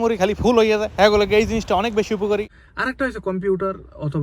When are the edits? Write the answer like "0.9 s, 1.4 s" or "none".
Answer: 2.5 s